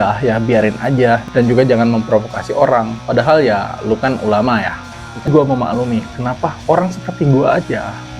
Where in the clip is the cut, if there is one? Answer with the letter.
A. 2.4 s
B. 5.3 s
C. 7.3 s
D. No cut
B